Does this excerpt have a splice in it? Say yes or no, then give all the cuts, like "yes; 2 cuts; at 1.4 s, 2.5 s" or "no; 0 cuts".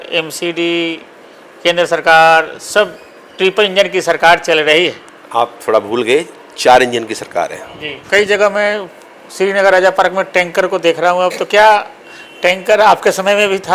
yes; 1 cut; at 7.9 s